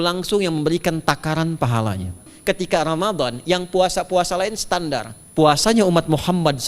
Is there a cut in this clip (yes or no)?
yes